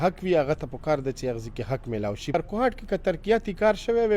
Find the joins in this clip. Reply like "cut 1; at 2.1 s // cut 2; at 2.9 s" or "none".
cut 1; at 2.3 s

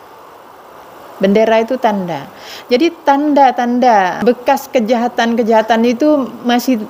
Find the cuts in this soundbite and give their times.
cut 1; at 4.1 s

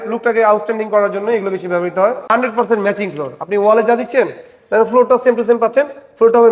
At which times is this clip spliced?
cut 1; at 2.2 s

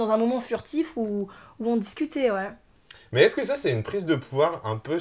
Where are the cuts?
none

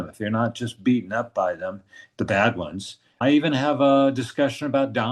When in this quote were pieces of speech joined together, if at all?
none

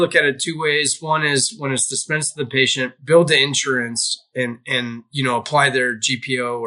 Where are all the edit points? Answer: cut 1; at 3.0 s

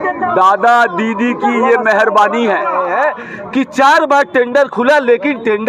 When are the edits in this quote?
cut 1; at 2.8 s

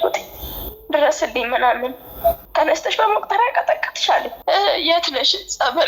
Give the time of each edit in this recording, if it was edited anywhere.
cut 1; at 2.4 s // cut 2; at 4.3 s

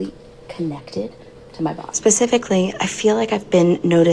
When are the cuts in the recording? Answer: cut 1; at 3.2 s

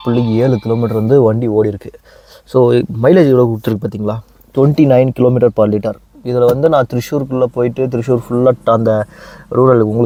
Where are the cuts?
none

